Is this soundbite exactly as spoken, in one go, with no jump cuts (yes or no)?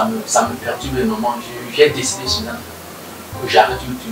yes